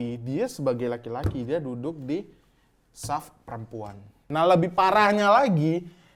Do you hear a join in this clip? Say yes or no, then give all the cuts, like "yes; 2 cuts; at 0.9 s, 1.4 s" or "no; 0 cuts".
yes; 1 cut; at 4.3 s